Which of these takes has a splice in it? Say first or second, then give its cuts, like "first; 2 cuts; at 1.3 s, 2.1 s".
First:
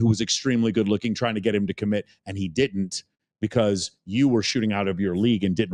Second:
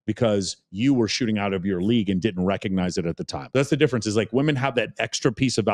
second; 1 cut; at 3.4 s